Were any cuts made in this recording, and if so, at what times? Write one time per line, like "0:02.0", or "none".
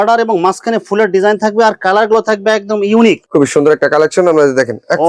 0:03.2